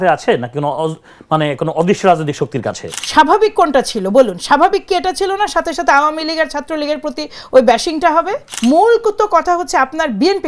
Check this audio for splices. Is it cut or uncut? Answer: cut